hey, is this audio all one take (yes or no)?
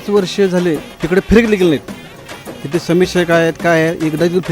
no